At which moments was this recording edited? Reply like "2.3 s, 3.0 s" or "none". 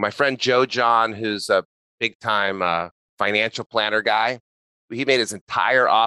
3.0 s, 4.9 s